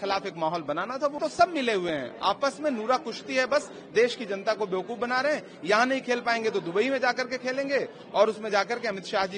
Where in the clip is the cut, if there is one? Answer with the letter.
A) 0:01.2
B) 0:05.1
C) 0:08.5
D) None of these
A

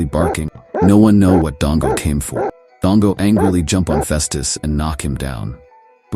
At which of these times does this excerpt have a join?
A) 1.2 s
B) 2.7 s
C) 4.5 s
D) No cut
B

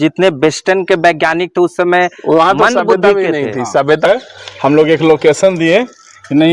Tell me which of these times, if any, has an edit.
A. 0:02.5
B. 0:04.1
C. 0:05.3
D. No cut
B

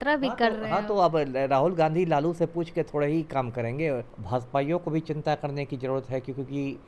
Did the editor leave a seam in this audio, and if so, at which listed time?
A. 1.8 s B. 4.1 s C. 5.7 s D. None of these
B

